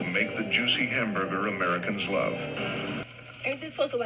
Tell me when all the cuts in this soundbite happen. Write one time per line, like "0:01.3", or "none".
0:03.0